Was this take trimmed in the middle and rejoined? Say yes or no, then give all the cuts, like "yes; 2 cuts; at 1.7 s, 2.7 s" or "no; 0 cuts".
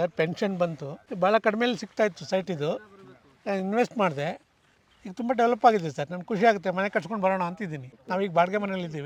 no; 0 cuts